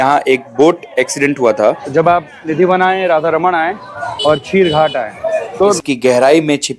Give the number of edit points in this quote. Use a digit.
2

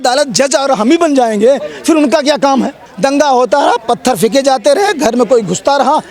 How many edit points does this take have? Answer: 1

